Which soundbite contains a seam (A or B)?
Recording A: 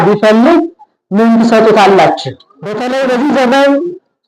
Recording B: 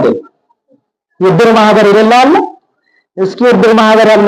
A